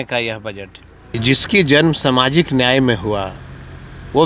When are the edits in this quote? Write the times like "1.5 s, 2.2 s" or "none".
1.2 s